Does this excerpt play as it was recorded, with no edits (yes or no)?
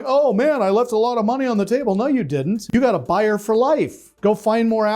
no